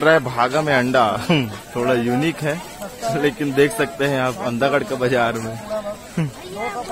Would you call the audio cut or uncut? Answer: uncut